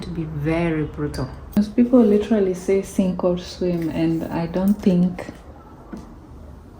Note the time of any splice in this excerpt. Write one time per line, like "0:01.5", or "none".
0:01.4